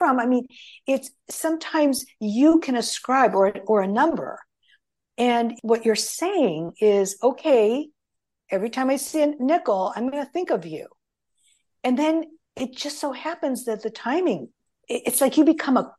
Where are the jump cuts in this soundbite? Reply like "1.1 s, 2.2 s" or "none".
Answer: 5.6 s, 14.5 s